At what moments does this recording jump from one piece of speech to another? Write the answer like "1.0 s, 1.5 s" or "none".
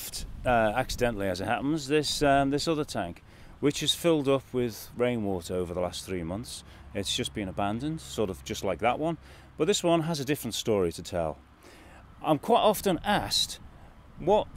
4.0 s